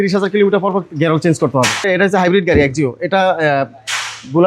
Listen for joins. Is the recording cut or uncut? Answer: cut